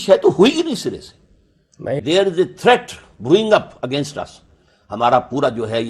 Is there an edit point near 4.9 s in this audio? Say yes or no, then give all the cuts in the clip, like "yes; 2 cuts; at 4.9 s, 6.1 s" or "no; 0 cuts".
no; 1 cut; at 2.0 s